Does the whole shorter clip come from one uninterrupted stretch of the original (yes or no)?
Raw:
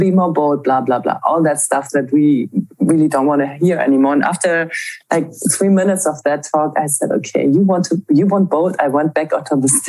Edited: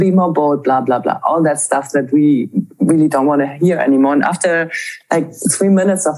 yes